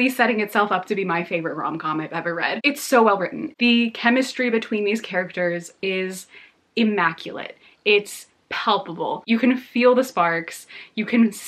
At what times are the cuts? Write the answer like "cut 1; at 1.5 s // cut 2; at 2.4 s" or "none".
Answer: none